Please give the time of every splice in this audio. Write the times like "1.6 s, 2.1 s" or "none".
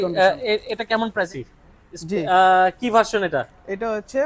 1.3 s